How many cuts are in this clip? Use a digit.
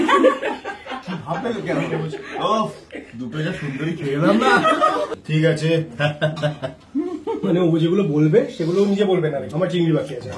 1